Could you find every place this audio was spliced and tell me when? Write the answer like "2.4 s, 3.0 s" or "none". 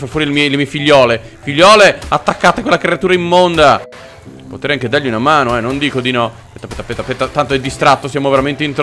none